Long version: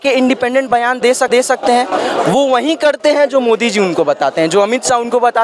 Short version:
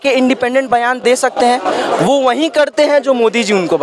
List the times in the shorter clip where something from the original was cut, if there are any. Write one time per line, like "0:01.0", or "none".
0:01.0